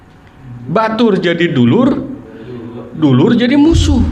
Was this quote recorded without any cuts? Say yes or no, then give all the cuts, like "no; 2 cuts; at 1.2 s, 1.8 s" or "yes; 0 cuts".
yes; 0 cuts